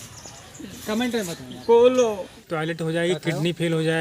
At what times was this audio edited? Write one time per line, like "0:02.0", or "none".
0:02.4